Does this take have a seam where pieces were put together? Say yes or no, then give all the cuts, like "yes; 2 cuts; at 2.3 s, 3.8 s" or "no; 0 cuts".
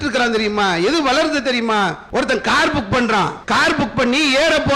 yes; 2 cuts; at 2.0 s, 3.4 s